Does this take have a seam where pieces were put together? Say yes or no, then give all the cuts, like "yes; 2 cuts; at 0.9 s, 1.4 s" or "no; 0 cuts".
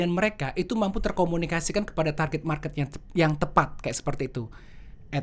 no; 0 cuts